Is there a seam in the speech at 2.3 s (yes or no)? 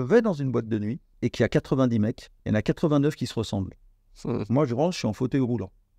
yes